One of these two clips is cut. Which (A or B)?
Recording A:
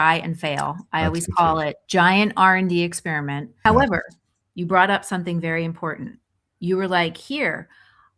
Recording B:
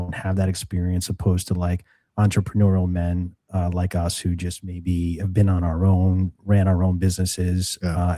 A